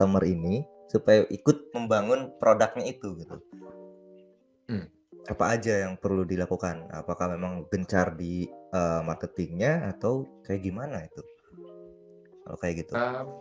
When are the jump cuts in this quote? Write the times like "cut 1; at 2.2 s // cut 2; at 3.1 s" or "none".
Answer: none